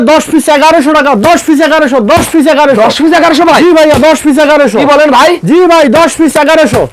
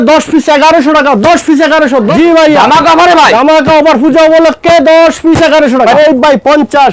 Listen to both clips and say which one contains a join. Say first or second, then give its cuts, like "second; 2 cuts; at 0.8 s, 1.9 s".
second; 2 cuts; at 2.1 s, 6.0 s